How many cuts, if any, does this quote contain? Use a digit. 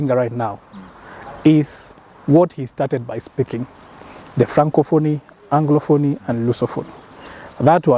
0